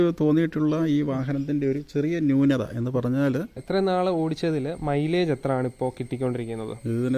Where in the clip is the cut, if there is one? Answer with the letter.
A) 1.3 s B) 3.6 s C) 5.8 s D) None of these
B